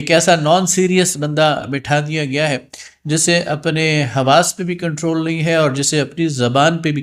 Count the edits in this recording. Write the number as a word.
zero